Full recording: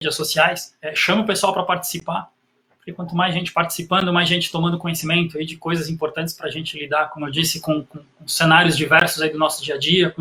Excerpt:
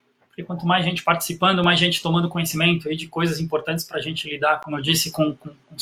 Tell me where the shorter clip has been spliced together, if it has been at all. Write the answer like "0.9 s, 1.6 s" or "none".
none